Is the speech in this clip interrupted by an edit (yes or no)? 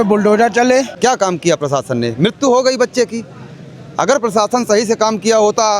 yes